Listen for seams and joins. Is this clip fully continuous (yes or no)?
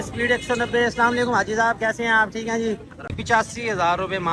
no